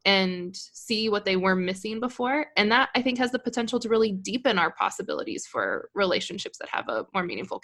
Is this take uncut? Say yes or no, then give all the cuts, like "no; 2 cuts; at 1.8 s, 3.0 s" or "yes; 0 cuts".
yes; 0 cuts